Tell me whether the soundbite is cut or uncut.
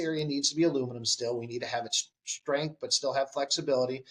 uncut